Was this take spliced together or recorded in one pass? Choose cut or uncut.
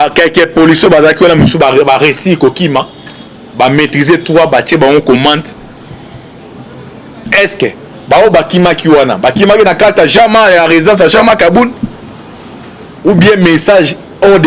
uncut